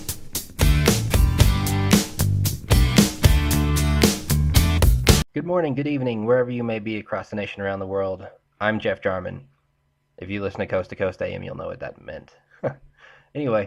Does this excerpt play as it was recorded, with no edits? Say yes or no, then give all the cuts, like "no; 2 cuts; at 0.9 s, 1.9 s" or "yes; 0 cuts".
yes; 0 cuts